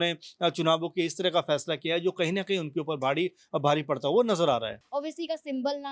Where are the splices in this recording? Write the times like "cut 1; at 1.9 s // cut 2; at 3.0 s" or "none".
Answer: cut 1; at 4.8 s